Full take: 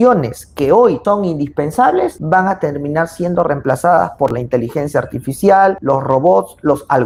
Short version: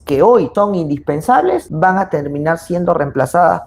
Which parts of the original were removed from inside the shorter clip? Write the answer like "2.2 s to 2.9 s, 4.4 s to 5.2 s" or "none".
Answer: none